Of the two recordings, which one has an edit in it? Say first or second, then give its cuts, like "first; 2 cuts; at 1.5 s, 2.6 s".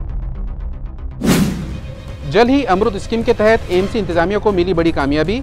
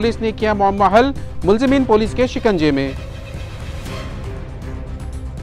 first; 1 cut; at 2.0 s